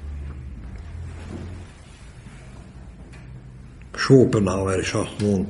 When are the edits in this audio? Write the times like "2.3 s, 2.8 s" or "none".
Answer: 1.7 s

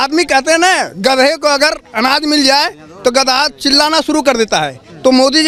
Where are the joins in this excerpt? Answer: none

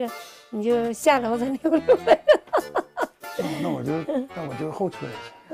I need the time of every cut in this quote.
none

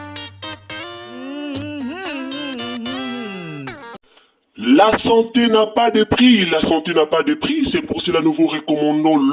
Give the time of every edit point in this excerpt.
3.8 s

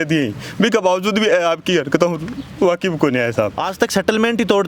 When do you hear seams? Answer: 3.6 s

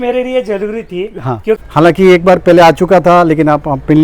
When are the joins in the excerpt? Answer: 1.6 s

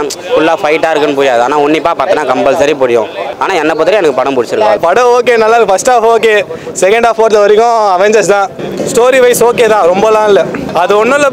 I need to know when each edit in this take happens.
4.8 s, 8.7 s

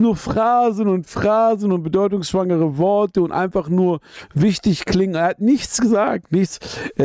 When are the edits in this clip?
none

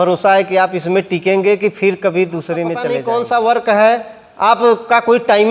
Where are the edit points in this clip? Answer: 2.9 s

